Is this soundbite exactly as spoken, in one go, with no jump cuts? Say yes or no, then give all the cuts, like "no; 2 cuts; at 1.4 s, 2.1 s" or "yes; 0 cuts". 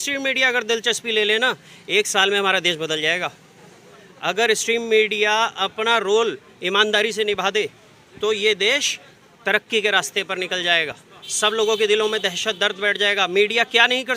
yes; 0 cuts